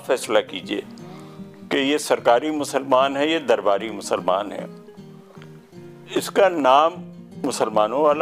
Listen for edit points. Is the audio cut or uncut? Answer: uncut